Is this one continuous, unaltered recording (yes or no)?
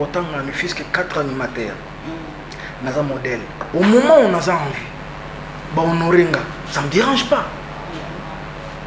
no